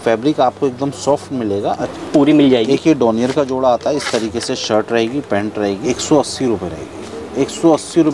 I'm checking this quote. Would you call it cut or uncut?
cut